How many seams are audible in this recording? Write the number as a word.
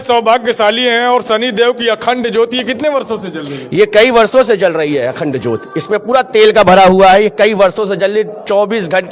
zero